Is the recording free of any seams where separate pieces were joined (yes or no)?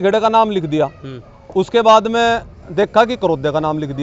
yes